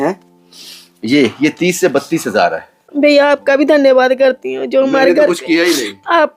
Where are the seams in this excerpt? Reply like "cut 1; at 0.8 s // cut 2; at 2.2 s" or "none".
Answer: cut 1; at 2.9 s

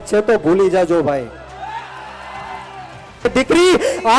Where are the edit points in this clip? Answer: cut 1; at 3.2 s

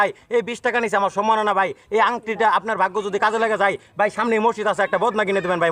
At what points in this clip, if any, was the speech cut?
none

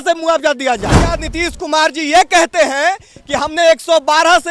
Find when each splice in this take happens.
cut 1; at 1.1 s

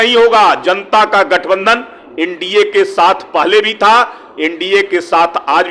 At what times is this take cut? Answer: none

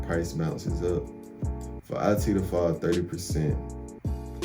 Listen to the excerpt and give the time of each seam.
cut 1; at 1.7 s

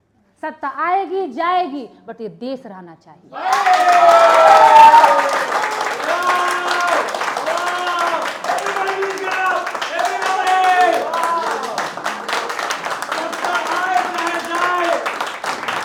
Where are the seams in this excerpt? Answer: none

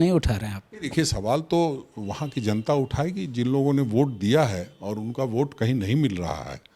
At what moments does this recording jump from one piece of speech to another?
none

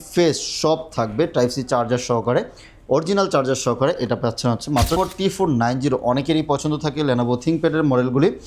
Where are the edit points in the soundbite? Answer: cut 1; at 5.0 s

